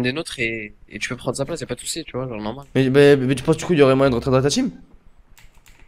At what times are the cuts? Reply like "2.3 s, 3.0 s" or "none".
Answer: 2.6 s